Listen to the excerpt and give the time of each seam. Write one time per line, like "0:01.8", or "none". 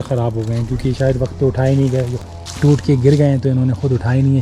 0:02.1